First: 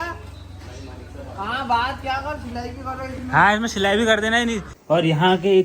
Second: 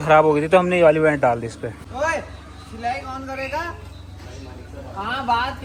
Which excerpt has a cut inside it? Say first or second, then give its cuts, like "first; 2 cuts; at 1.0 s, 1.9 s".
first; 1 cut; at 4.7 s